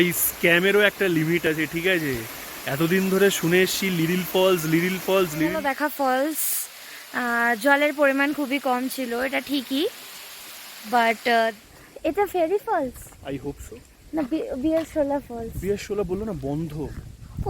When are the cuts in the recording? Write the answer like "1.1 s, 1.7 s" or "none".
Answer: 5.6 s, 11.6 s